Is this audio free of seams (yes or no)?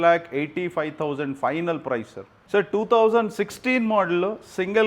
no